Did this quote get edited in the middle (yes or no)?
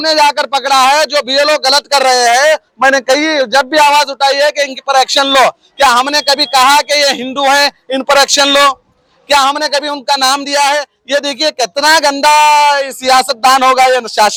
no